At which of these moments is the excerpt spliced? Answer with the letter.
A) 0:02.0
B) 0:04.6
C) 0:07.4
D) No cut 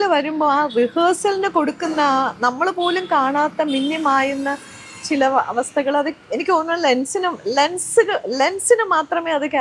D